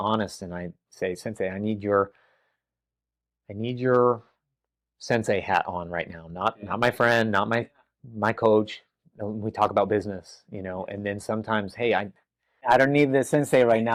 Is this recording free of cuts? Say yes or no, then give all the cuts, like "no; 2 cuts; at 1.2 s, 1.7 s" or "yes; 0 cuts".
yes; 0 cuts